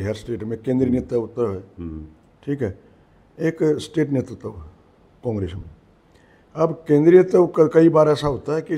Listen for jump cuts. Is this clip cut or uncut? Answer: uncut